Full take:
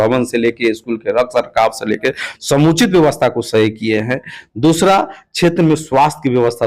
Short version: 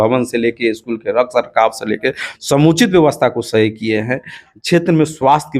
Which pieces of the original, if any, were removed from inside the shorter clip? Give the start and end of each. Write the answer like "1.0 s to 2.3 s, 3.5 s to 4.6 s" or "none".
4.5 s to 5.2 s